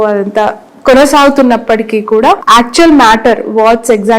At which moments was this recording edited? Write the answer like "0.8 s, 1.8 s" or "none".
2.4 s